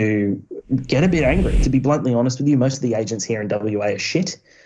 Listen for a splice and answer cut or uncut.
cut